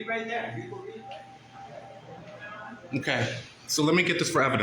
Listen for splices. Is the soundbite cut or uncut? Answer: cut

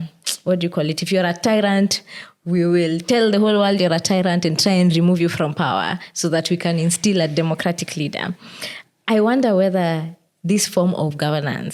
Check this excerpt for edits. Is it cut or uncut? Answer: uncut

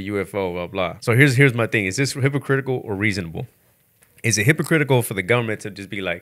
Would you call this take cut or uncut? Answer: cut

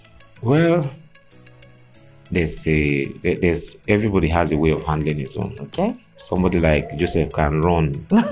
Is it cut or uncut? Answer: uncut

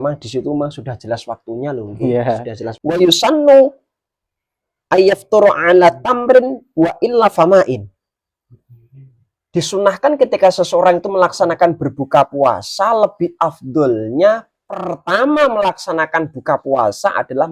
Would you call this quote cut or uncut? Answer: cut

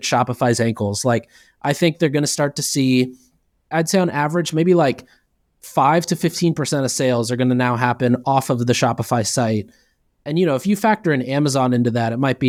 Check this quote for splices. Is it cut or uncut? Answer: uncut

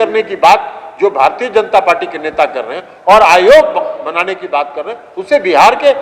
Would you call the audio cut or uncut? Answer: uncut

